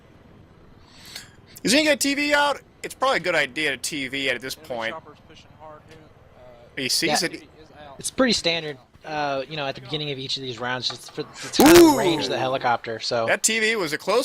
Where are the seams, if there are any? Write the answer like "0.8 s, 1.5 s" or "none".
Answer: 4.7 s